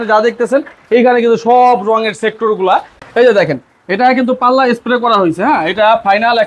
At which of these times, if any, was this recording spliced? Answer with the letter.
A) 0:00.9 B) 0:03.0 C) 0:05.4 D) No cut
B